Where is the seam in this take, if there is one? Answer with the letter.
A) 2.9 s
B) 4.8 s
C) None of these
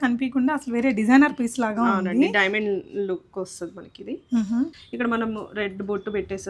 B